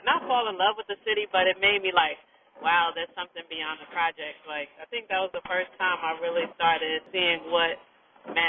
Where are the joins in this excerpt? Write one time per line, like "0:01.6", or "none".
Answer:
0:07.1